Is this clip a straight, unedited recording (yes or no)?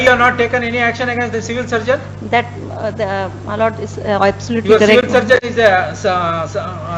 yes